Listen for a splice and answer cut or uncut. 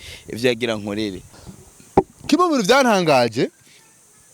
cut